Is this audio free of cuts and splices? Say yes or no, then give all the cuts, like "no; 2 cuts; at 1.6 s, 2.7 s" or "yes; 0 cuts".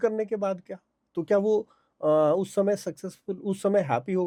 yes; 0 cuts